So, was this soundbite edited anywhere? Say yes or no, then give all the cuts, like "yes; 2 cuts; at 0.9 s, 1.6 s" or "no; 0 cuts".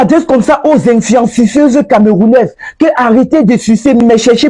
no; 0 cuts